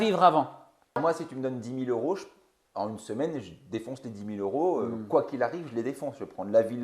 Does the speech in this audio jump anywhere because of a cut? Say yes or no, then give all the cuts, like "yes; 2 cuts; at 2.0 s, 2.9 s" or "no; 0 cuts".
yes; 1 cut; at 1.0 s